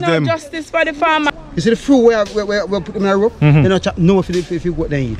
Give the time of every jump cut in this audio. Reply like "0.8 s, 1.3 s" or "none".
1.3 s